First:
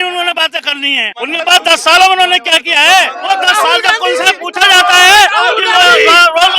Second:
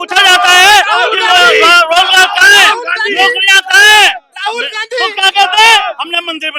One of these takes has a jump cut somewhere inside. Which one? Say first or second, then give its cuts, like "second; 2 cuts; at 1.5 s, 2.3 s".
first; 2 cuts; at 1.1 s, 3.2 s